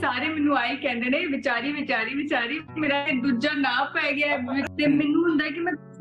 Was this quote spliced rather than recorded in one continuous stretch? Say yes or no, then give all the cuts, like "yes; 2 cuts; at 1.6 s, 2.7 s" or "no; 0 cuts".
yes; 1 cut; at 4.7 s